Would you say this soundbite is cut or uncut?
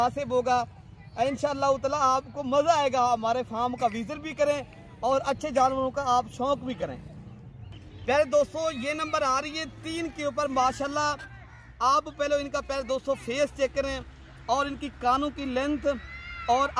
uncut